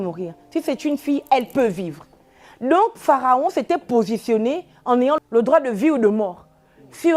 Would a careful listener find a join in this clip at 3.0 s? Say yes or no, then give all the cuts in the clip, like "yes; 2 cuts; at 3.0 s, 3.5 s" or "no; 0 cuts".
no; 1 cut; at 5.2 s